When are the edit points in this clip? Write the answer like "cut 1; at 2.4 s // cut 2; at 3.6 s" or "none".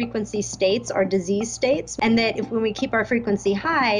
cut 1; at 1.9 s